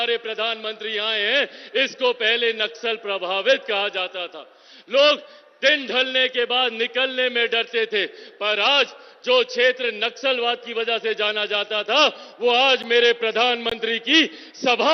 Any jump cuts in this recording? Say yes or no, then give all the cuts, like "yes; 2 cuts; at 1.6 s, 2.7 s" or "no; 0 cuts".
no; 0 cuts